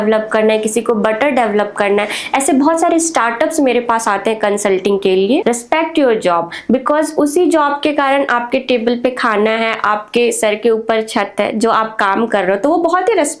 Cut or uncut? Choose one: cut